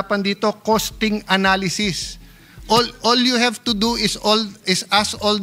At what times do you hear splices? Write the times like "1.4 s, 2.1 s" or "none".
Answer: none